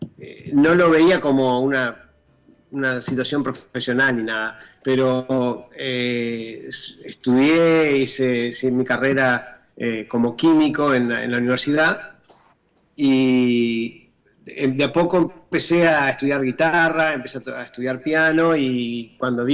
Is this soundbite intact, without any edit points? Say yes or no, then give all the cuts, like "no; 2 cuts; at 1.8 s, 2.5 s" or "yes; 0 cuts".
no; 1 cut; at 13.0 s